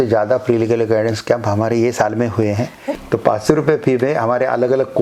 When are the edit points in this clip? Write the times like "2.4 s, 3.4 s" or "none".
2.8 s